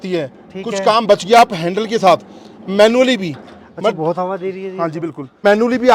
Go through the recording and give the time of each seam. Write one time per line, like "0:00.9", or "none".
none